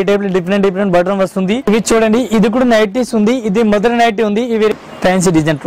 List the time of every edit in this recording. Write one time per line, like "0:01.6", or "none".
0:01.7
0:04.7